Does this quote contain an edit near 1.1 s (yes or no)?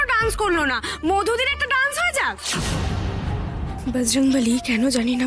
no